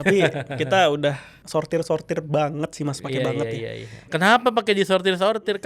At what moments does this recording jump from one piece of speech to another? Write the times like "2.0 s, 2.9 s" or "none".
1.3 s, 4.1 s